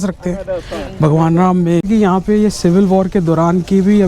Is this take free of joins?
no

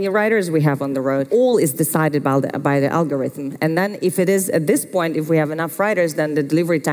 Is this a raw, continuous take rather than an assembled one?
no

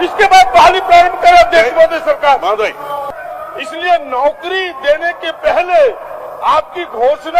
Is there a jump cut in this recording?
yes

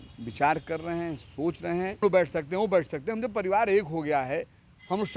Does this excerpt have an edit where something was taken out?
yes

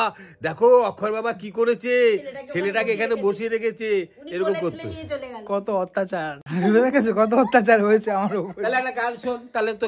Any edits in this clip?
no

